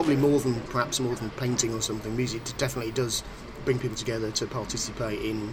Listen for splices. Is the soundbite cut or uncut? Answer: uncut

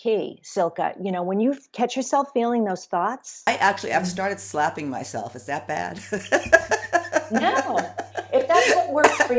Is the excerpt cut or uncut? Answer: cut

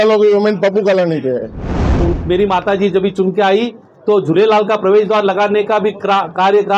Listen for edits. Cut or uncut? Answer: cut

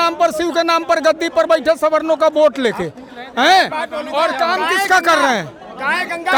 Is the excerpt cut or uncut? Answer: uncut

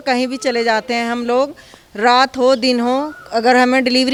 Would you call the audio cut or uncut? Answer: uncut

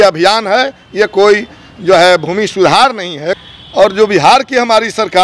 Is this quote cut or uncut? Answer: cut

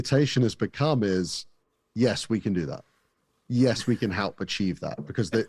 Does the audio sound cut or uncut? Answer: uncut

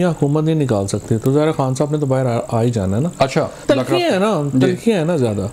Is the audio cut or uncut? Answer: cut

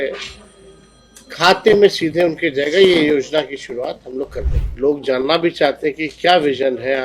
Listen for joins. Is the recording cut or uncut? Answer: cut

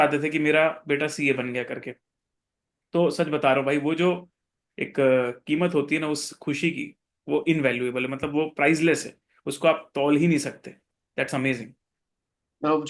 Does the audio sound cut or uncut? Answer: uncut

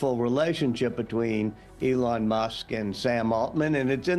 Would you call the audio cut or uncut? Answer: uncut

